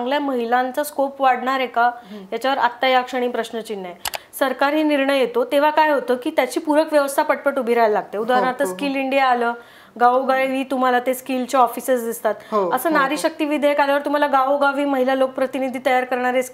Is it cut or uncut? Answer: cut